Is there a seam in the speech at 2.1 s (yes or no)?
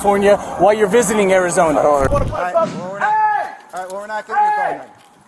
yes